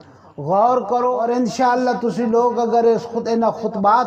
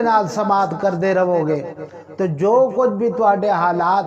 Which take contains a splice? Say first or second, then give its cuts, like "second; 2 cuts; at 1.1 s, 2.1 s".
first; 1 cut; at 1.1 s